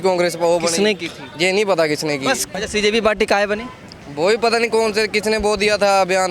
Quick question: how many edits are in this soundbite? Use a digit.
1